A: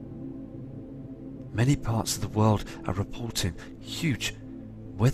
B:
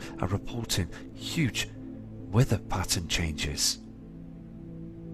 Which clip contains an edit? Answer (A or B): A